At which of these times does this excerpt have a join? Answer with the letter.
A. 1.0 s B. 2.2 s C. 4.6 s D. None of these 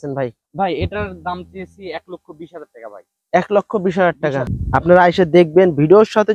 C